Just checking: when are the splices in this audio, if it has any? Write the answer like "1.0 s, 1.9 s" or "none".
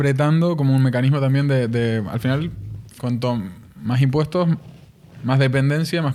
none